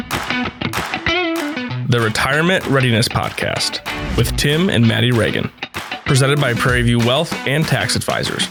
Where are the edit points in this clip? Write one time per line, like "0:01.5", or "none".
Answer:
none